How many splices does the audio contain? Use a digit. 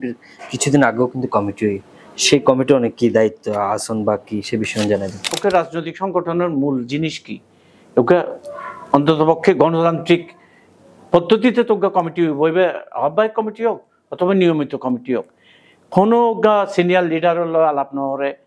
1